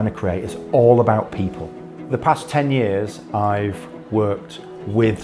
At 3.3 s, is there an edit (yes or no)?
no